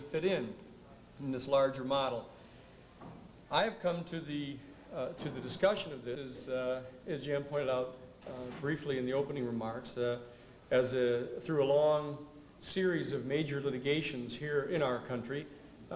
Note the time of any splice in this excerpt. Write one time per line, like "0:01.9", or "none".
none